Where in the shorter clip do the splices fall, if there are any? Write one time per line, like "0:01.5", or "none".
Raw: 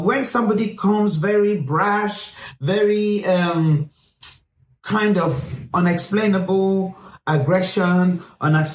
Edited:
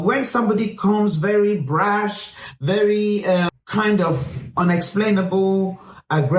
0:03.5